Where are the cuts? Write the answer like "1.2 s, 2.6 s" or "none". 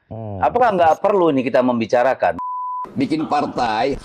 2.6 s